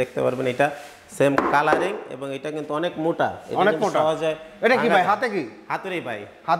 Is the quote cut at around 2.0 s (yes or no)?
no